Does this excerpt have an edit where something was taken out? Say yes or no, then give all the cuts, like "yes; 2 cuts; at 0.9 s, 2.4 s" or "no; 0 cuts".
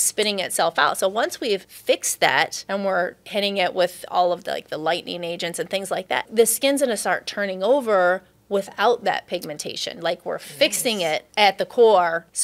yes; 3 cuts; at 1.7 s, 2.6 s, 6.3 s